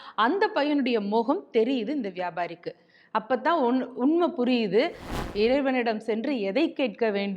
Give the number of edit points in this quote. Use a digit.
1